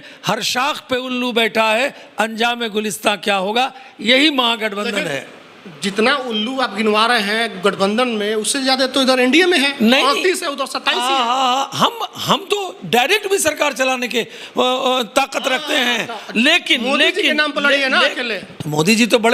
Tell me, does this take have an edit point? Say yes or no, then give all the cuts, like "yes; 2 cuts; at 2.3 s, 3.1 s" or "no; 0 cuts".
no; 0 cuts